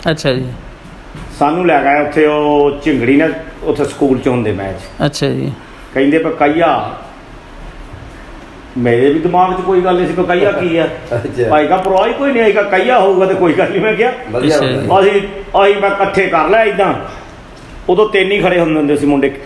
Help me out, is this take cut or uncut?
uncut